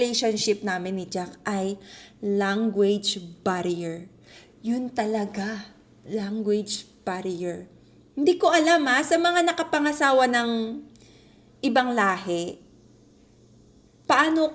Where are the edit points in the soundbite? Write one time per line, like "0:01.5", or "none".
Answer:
none